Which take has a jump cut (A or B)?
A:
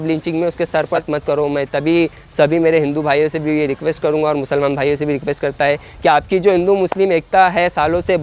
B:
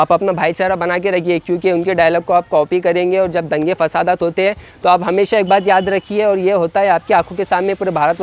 A